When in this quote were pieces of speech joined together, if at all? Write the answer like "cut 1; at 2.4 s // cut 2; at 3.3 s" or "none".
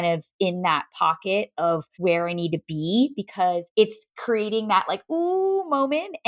cut 1; at 1.9 s // cut 2; at 3.7 s